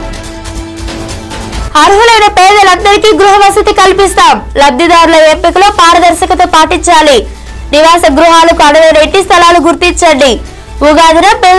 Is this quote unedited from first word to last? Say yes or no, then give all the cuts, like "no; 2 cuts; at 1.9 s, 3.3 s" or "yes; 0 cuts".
no; 1 cut; at 1.6 s